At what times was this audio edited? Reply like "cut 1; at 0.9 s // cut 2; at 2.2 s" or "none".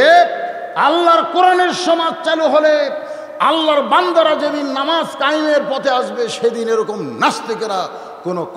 none

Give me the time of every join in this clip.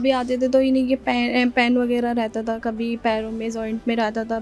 none

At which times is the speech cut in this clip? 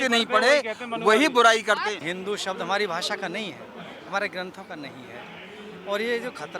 cut 1; at 2.0 s

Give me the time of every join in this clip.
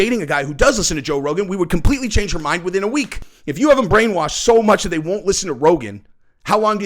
cut 1; at 3.2 s

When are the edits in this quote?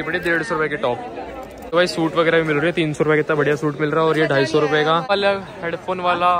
cut 1; at 1.6 s // cut 2; at 5.0 s

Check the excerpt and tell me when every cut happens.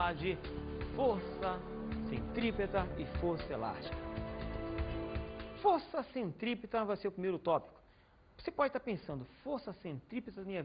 none

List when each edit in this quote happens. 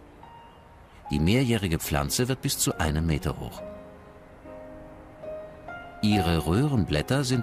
cut 1; at 4.9 s

